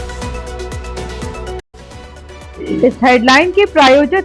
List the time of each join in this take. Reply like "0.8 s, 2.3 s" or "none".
1.6 s